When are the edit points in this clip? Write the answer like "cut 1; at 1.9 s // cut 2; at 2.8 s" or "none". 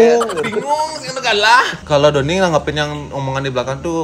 cut 1; at 1.8 s